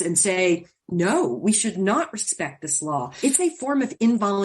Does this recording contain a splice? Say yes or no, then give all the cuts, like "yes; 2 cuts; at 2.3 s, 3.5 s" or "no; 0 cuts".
yes; 1 cut; at 3.1 s